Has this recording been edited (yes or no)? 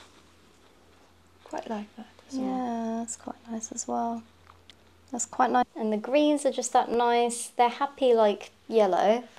yes